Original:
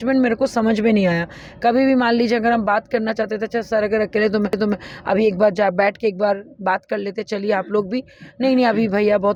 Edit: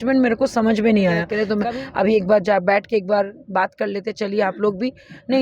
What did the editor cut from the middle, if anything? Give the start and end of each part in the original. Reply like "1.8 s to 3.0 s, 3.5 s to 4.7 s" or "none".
1.4 s to 4.5 s

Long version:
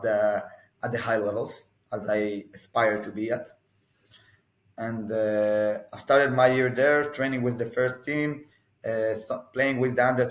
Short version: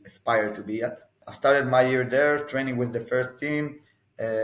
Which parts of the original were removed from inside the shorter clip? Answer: 3.7 s to 5.9 s

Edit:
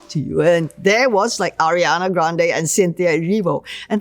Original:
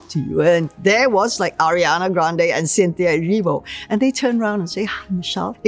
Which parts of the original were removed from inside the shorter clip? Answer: none

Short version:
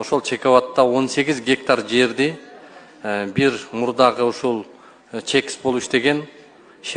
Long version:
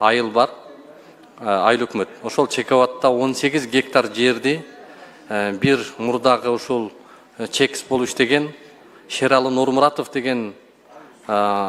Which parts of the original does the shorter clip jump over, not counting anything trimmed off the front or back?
none

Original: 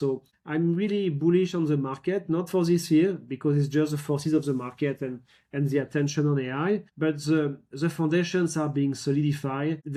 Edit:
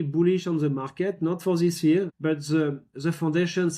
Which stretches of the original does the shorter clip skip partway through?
3.2 s to 6.9 s

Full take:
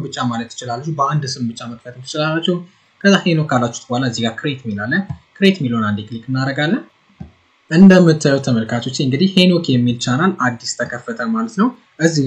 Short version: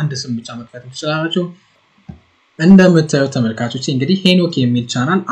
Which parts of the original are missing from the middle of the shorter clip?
2.9 s to 6.9 s

